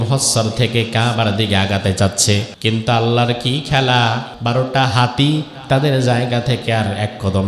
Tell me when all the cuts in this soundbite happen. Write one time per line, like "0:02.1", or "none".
0:02.5
0:04.3